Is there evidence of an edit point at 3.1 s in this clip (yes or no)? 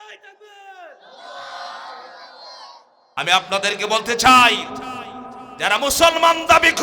yes